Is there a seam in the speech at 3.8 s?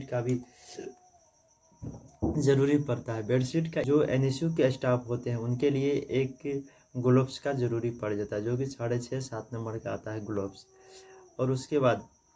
yes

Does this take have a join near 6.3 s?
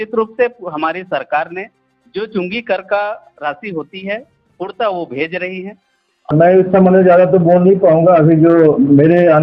yes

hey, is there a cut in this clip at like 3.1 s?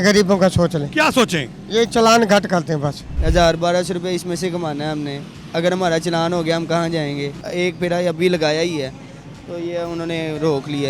yes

